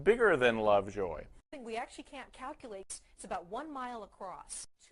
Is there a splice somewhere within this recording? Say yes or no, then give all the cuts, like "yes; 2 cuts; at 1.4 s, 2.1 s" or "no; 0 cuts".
no; 0 cuts